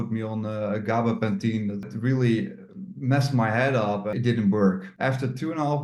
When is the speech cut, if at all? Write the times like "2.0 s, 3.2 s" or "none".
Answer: 1.9 s, 4.1 s, 4.9 s